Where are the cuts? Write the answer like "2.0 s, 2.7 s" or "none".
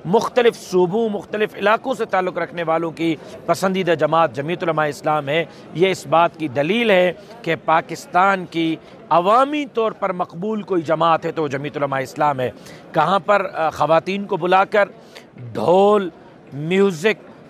none